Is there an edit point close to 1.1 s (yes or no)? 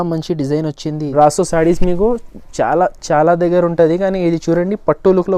yes